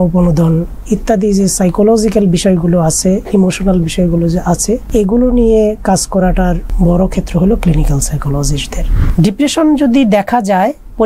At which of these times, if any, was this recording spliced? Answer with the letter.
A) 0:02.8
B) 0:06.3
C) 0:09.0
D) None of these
C